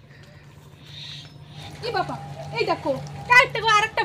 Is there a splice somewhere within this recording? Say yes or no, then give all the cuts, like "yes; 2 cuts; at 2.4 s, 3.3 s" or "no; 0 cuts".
yes; 1 cut; at 1.6 s